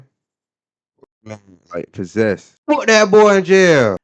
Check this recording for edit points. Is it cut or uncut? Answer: cut